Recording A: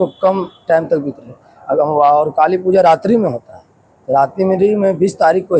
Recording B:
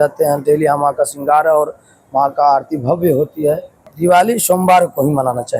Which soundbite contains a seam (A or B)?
B